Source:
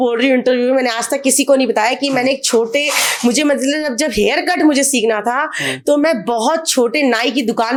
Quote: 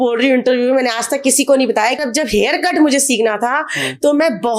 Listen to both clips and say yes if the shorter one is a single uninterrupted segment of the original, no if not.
no